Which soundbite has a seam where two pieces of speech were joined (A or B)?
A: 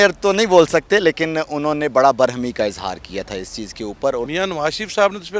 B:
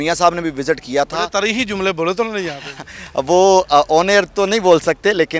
A